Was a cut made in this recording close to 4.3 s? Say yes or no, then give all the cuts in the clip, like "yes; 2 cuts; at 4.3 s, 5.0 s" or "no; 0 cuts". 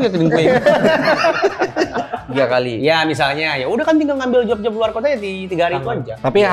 no; 1 cut; at 2.2 s